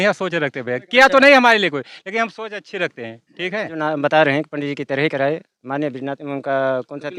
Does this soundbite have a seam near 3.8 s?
yes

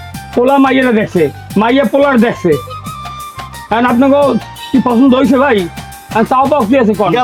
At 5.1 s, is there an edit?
no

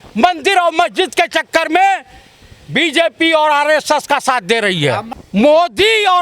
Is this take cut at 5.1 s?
yes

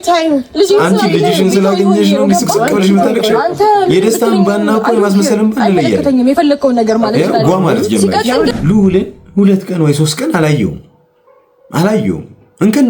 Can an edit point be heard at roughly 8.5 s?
yes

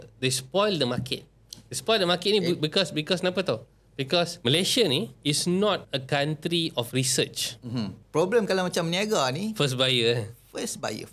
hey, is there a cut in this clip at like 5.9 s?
yes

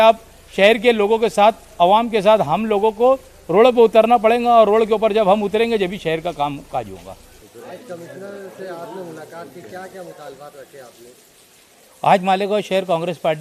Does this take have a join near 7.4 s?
yes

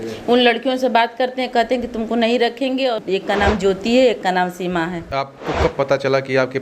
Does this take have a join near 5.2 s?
yes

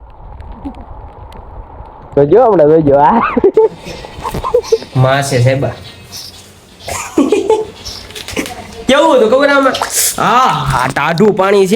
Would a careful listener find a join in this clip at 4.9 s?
yes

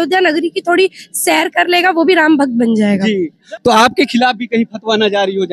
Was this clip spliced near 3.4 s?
yes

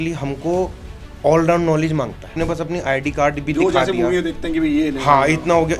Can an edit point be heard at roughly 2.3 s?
yes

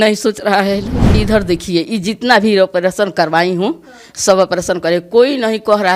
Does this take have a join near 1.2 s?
yes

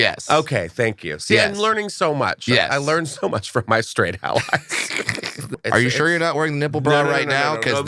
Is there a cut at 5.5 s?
yes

